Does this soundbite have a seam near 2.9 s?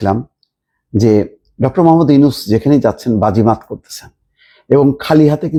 no; 0 cuts

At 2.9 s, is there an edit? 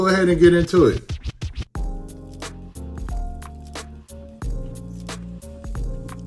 no; 1 cut; at 1.0 s

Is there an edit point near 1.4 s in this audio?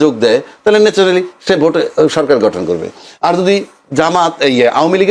no; 0 cuts

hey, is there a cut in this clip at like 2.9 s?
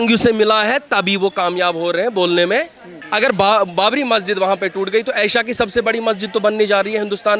yes; 1 cut; at 2.9 s

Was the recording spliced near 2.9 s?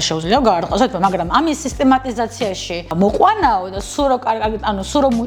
yes; 1 cut; at 2.9 s

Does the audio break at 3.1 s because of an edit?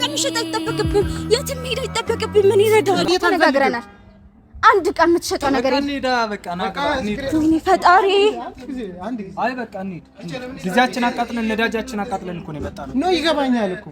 yes; 1 cut; at 3.1 s

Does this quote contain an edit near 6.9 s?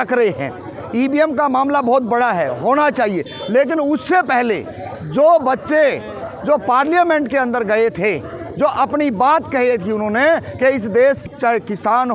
no; 1 cut; at 11.2 s

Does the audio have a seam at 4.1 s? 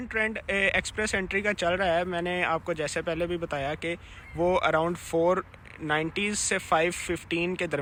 no; 0 cuts

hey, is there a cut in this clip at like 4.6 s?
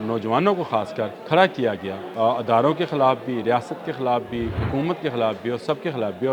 yes; 3 cuts; at 1.2 s, 2.0 s, 4.6 s

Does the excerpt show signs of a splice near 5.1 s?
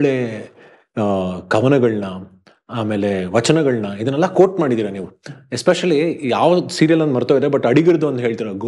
no; 0 cuts

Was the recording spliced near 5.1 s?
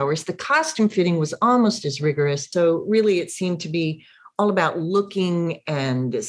no; 1 cut; at 2.4 s

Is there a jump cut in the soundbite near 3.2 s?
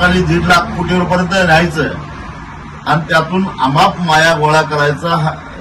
no; 0 cuts

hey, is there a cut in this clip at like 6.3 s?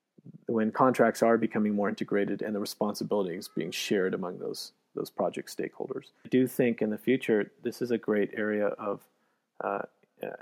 yes; 1 cut; at 6.3 s

